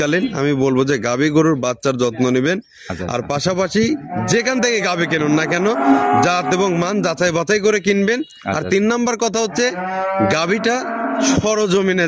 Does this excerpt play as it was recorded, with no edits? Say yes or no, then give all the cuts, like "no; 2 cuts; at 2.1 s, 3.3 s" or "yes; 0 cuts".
yes; 0 cuts